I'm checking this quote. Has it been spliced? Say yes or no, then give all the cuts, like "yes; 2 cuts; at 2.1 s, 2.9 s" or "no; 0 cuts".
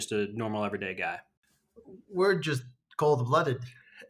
no; 0 cuts